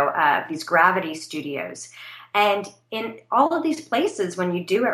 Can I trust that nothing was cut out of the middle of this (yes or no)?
yes